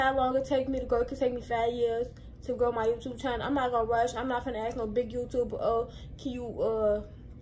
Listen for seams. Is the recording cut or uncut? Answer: uncut